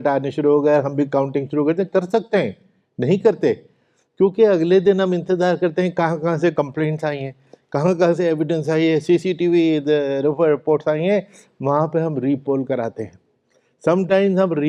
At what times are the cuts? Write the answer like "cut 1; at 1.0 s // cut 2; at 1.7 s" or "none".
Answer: none